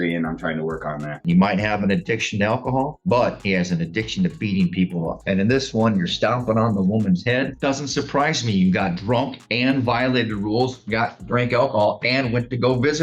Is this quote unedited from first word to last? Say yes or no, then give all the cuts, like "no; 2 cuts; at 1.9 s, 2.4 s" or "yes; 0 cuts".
no; 3 cuts; at 1.2 s, 5.2 s, 7.5 s